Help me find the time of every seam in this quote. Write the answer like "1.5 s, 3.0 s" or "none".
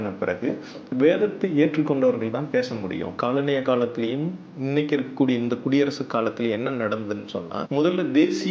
3.1 s, 7.6 s